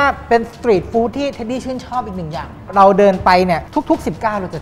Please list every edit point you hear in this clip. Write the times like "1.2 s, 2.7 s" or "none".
2.6 s, 3.7 s